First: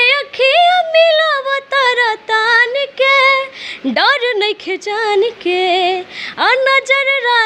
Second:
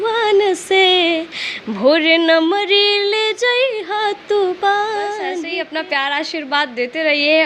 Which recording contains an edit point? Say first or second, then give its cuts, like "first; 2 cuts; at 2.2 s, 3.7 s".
second; 1 cut; at 5.4 s